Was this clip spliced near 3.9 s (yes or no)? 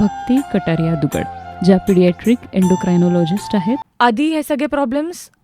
yes